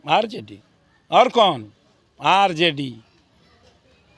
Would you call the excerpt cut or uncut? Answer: uncut